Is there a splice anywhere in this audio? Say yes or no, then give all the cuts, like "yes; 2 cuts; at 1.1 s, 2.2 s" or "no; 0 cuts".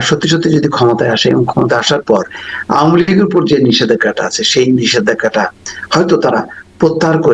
no; 0 cuts